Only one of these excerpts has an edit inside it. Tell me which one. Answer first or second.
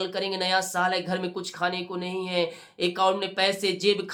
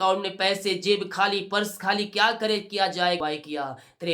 second